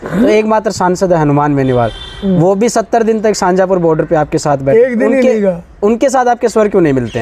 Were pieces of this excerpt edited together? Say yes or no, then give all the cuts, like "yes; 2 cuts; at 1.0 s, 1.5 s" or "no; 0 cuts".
no; 0 cuts